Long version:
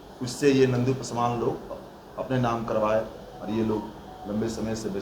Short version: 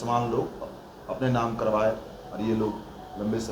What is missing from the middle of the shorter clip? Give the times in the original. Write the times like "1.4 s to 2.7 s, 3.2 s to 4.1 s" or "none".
none